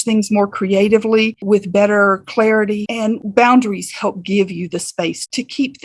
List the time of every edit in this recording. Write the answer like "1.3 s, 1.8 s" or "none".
3.2 s